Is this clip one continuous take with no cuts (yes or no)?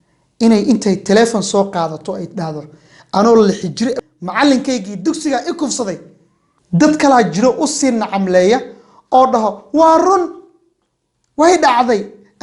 no